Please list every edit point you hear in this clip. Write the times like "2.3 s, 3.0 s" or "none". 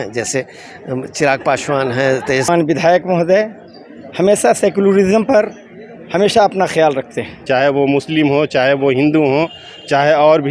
2.5 s, 7.4 s